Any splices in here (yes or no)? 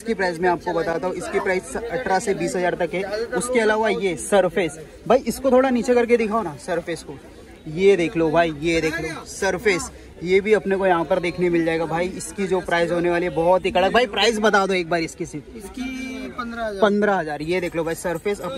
no